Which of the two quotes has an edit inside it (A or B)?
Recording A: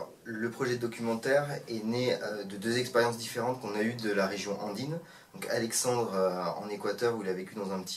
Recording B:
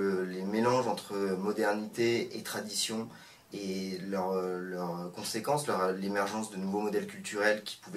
B